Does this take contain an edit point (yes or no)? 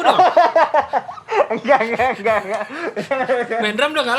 no